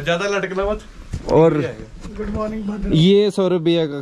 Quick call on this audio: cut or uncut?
uncut